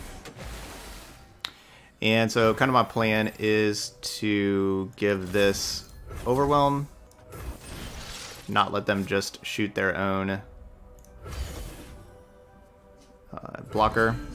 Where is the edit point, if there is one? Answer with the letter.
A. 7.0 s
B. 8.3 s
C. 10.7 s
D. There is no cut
A